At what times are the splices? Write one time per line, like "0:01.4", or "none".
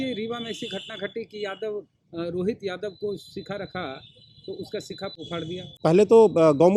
0:05.7